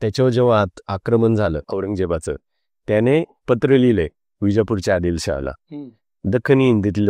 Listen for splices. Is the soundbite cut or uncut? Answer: cut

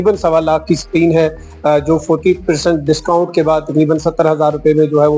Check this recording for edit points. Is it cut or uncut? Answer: uncut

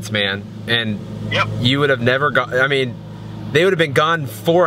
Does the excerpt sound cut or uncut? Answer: uncut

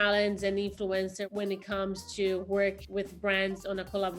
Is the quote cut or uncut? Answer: cut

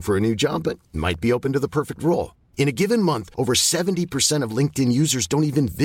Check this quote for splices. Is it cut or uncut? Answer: uncut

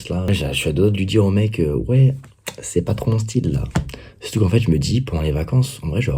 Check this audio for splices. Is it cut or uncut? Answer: uncut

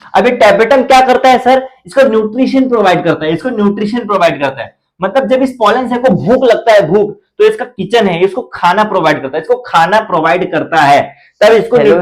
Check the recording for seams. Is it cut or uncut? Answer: uncut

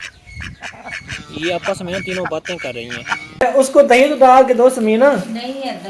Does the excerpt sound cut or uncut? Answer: cut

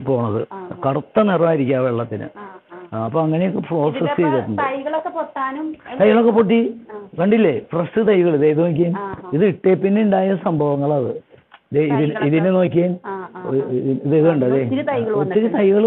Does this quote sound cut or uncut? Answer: uncut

